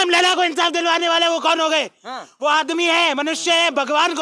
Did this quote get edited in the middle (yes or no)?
no